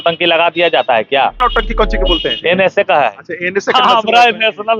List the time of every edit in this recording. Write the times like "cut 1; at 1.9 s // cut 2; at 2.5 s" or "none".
cut 1; at 1.4 s